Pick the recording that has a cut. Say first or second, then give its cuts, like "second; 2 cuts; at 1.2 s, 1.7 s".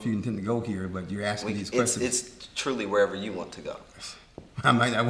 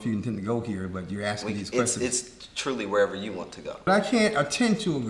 second; 1 cut; at 3.8 s